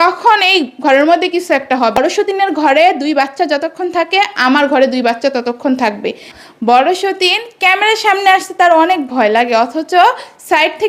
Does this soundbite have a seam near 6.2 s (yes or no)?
yes